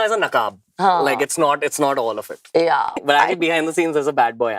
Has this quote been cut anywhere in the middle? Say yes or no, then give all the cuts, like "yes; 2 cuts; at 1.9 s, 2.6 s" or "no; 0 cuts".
yes; 1 cut; at 3.0 s